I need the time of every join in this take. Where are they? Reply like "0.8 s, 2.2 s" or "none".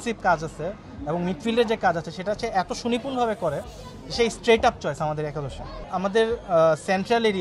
5.9 s